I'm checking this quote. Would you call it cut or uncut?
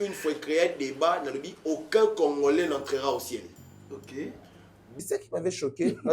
cut